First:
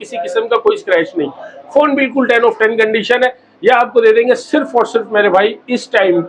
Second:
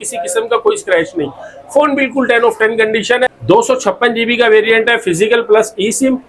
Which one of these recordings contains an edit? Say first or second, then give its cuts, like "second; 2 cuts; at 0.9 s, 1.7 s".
second; 1 cut; at 3.4 s